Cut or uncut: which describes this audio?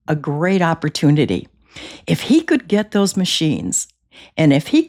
uncut